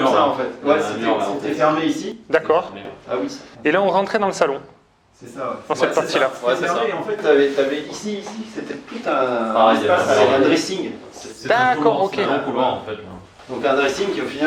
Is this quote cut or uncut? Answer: uncut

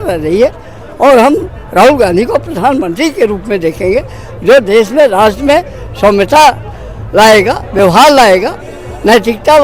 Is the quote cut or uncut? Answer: uncut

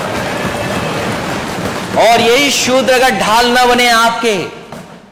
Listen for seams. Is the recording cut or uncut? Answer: uncut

